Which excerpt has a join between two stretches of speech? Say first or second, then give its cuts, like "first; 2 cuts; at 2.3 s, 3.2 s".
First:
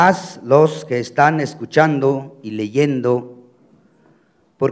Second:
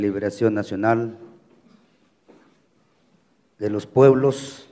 first; 1 cut; at 1.1 s